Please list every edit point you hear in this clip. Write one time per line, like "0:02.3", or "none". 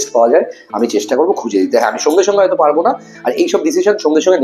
none